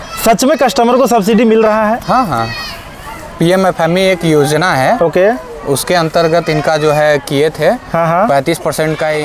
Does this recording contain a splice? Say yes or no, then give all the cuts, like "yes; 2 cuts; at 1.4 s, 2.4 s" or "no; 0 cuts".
no; 0 cuts